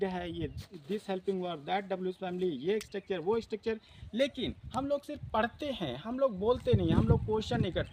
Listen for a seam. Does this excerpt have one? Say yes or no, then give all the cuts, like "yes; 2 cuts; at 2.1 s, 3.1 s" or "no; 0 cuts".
no; 0 cuts